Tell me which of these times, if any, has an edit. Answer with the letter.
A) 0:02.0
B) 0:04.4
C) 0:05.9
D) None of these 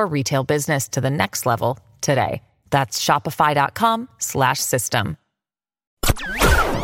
C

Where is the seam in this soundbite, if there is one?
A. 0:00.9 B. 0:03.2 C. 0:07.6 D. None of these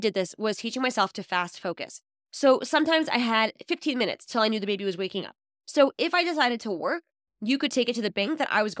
D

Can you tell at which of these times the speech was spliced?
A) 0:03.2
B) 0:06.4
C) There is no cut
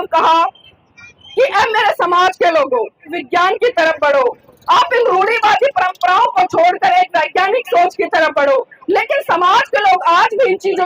A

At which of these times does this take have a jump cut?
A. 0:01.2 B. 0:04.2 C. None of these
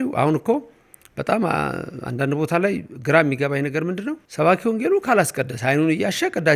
B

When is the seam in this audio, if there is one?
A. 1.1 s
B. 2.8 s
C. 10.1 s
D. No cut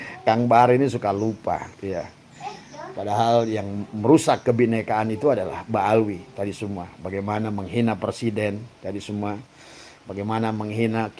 D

